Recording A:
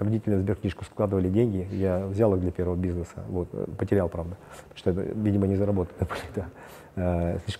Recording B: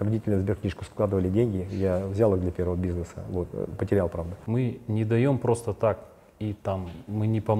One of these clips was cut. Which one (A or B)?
B